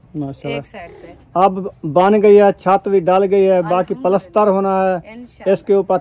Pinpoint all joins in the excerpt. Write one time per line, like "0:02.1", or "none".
none